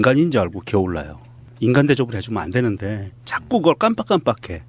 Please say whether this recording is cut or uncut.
cut